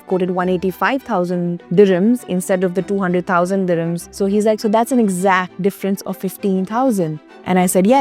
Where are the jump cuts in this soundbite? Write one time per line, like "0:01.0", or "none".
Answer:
0:01.6
0:04.0
0:05.5